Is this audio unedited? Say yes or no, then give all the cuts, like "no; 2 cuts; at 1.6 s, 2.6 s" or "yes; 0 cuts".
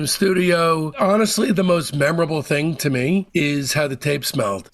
no; 1 cut; at 0.9 s